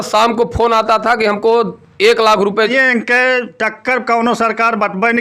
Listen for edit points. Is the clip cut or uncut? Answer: cut